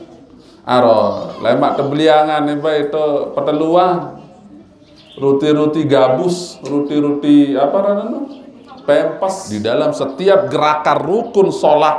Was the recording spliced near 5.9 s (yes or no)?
no